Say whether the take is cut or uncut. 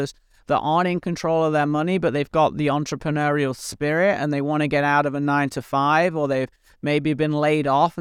uncut